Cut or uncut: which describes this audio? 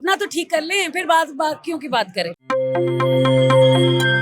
cut